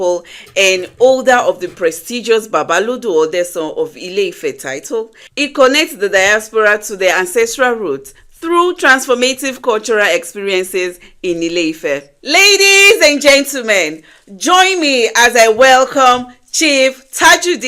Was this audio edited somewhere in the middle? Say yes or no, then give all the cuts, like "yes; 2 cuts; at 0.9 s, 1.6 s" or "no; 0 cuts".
yes; 2 cuts; at 5.2 s, 12.1 s